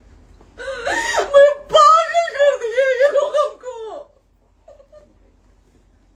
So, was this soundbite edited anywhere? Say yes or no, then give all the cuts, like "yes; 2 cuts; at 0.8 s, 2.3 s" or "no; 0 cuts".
no; 0 cuts